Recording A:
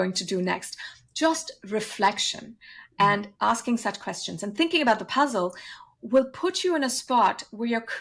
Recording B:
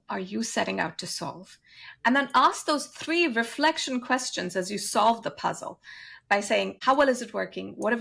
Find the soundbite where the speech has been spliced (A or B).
B